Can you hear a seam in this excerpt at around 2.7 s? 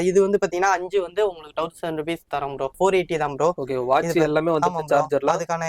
yes; 1 cut; at 2.7 s

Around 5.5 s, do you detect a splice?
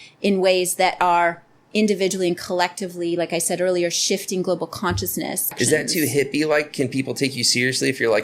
yes; 1 cut; at 5.5 s

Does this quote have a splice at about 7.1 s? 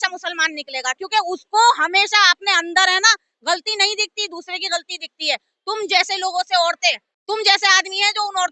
yes; 1 cut; at 7.1 s

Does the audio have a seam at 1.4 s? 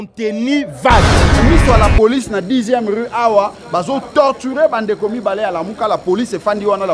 yes; 1 cut; at 1.4 s

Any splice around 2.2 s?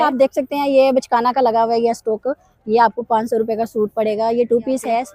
no; 0 cuts

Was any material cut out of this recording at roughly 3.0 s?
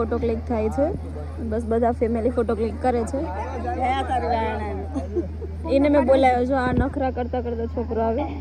no; 0 cuts

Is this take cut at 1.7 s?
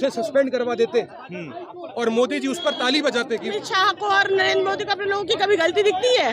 no; 1 cut; at 3.5 s

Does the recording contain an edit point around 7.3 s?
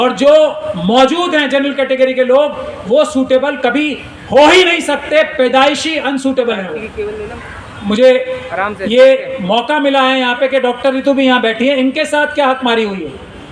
yes; 1 cut; at 7.3 s

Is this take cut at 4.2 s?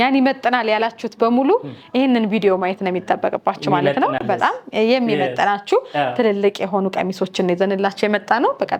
no; 0 cuts

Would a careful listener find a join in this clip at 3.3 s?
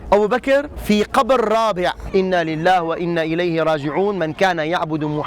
no; 1 cut; at 2.0 s

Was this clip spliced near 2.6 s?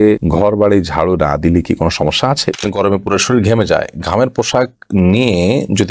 yes; 1 cut; at 2.6 s

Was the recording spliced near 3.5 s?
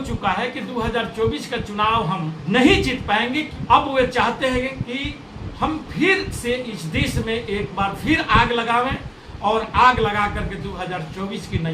yes; 2 cuts; at 2.4 s, 3.5 s

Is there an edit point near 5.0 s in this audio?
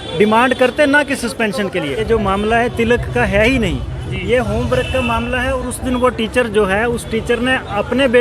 no; 1 cut; at 2.0 s

